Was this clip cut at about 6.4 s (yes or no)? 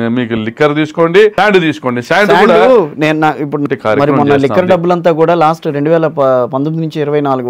no